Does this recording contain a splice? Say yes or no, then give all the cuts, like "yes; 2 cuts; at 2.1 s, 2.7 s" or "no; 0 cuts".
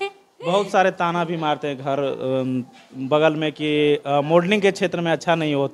no; 0 cuts